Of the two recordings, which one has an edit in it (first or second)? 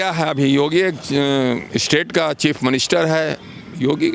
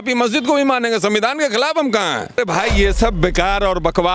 second